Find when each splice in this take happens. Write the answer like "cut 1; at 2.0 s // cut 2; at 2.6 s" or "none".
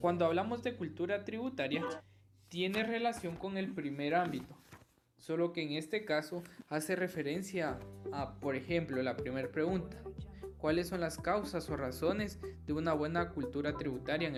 none